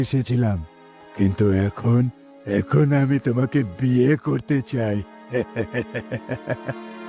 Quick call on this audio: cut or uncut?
uncut